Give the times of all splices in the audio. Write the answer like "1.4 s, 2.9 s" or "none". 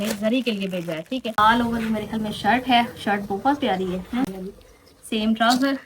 1.4 s, 4.3 s